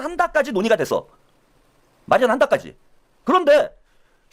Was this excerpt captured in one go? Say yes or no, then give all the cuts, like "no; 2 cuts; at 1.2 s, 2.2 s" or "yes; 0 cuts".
yes; 0 cuts